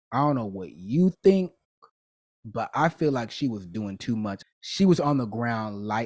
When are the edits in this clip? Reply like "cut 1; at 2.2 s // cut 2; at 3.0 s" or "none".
cut 1; at 4.4 s